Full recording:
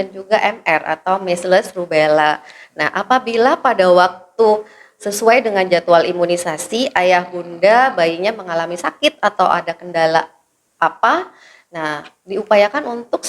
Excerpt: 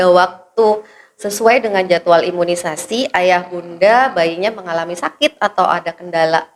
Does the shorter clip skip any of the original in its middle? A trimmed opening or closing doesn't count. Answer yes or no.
no